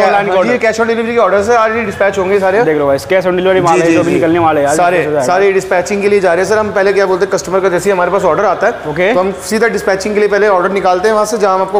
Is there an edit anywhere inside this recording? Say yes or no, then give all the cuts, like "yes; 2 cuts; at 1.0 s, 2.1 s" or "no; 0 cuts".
no; 0 cuts